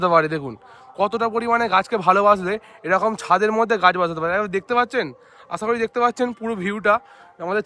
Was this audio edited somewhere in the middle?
no; 0 cuts

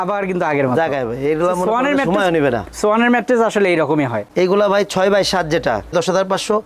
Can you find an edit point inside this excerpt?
no; 0 cuts

